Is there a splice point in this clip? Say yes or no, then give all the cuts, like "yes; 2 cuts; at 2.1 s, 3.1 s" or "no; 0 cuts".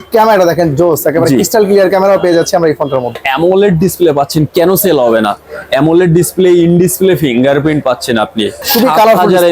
yes; 2 cuts; at 3.2 s, 8.7 s